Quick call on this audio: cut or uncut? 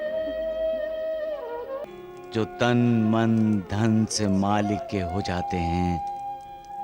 cut